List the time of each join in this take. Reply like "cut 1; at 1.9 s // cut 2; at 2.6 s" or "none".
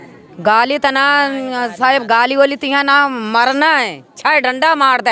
none

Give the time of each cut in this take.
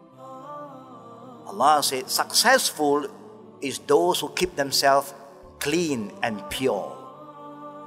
cut 1; at 1.5 s // cut 2; at 7.0 s

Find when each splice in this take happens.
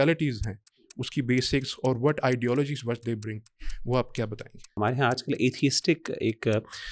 cut 1; at 4.6 s

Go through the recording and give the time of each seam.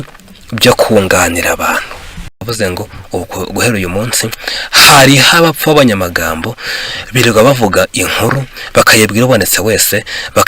cut 1; at 2.4 s

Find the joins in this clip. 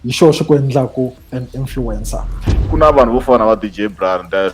cut 1; at 2.5 s

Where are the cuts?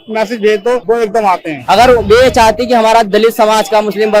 cut 1; at 1.2 s

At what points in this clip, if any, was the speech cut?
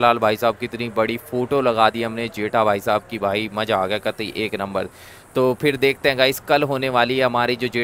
none

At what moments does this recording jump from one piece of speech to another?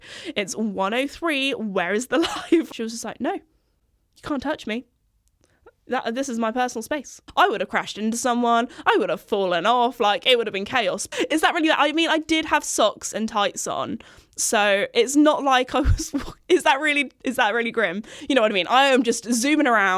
cut 1; at 2.7 s // cut 2; at 7.2 s // cut 3; at 11.0 s // cut 4; at 18.1 s

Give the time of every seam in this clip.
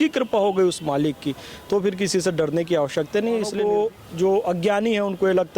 cut 1; at 3.5 s

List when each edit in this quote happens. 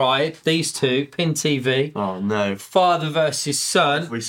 none

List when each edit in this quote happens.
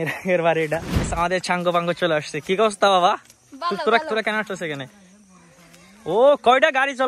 cut 1; at 1.1 s

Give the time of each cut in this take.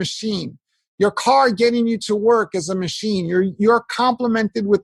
none

